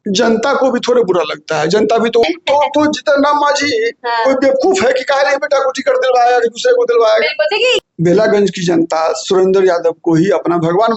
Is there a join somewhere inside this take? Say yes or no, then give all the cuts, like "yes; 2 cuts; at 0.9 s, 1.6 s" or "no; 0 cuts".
yes; 2 cuts; at 2.2 s, 7.8 s